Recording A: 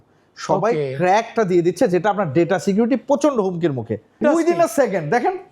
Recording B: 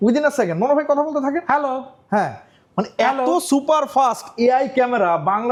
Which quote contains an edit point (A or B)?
A